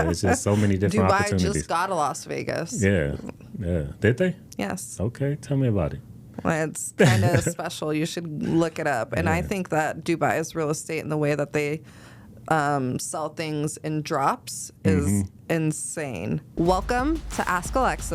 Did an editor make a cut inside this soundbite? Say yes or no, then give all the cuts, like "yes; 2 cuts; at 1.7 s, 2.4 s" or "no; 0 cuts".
yes; 1 cut; at 16.5 s